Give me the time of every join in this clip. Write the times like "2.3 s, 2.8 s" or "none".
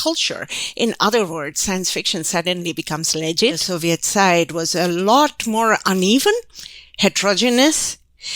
3.7 s